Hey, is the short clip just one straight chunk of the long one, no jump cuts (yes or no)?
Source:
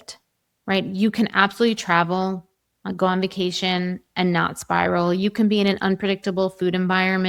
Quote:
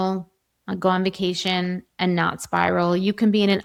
yes